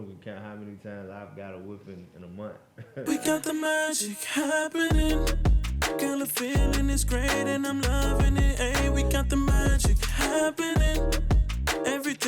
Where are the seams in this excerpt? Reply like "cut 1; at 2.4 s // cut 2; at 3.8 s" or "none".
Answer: cut 1; at 3.0 s